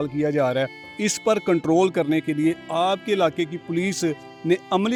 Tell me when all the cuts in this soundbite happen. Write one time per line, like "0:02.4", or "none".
none